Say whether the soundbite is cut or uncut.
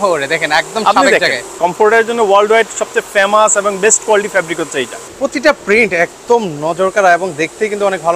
cut